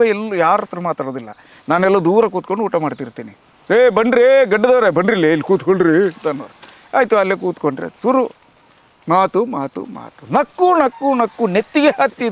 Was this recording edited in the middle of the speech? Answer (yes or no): no